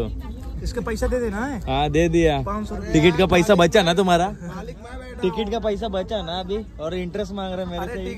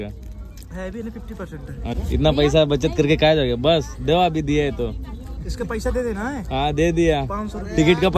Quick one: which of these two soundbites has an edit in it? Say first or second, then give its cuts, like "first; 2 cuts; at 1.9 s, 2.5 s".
second; 1 cut; at 1.9 s